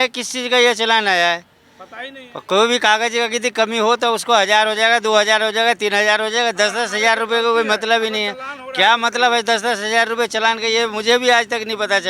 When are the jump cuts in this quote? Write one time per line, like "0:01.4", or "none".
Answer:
none